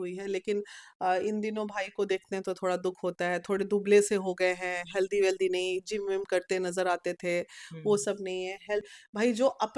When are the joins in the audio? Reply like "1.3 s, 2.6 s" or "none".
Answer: 8.9 s